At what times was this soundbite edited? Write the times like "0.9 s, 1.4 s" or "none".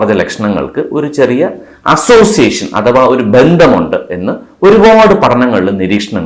none